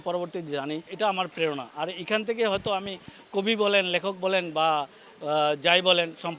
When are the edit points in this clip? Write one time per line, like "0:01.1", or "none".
0:00.9